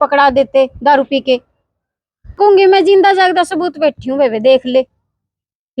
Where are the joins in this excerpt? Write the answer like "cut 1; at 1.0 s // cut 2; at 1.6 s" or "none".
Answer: cut 1; at 2.4 s